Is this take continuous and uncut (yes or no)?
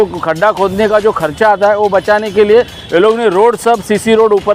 yes